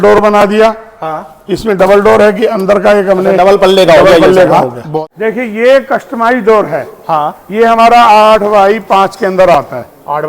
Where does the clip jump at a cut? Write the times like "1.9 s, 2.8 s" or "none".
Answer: 5.1 s